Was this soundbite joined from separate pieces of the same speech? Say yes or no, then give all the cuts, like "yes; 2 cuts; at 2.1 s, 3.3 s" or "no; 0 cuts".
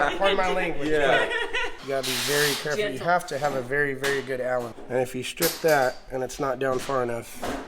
yes; 1 cut; at 1.8 s